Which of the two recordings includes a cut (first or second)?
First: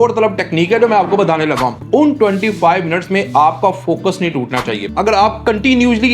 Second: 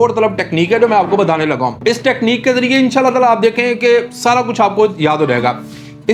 first